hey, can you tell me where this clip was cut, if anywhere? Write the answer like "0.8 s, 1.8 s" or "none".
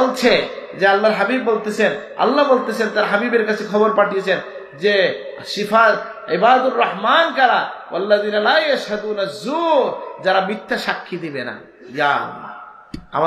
none